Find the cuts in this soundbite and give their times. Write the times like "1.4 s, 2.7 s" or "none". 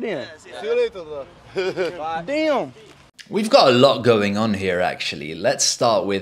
none

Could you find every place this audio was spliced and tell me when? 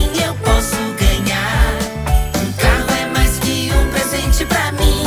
none

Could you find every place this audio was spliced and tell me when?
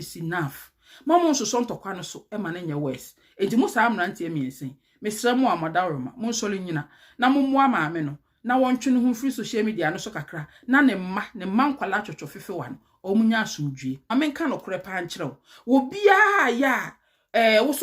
14.1 s

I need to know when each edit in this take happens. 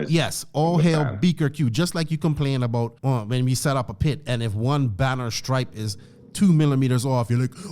2.9 s

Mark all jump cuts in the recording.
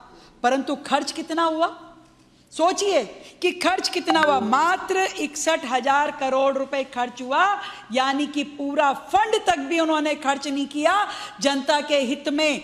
4.4 s, 10.4 s

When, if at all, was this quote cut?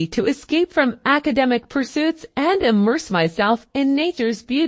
2.2 s

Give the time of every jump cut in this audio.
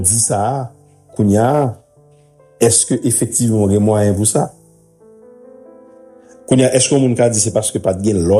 4.6 s, 6.4 s

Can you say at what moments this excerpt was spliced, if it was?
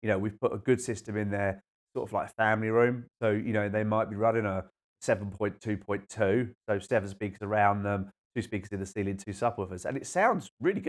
none

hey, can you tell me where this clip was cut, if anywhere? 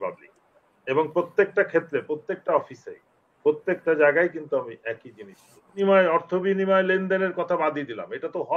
5.8 s

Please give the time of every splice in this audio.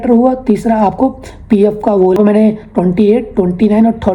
2.2 s

